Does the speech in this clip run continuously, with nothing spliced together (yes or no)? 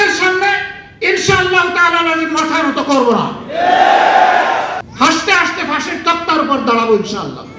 no